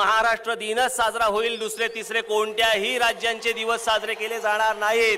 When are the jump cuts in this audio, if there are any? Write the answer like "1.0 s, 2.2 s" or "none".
none